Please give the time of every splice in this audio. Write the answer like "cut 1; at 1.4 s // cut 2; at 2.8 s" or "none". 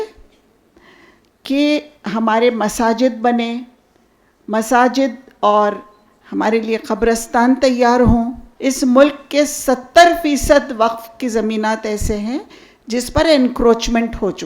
cut 1; at 8.4 s